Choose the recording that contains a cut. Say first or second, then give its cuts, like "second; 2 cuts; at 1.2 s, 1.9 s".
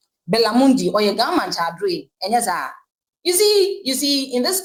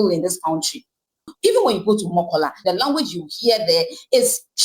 second; 1 cut; at 1.2 s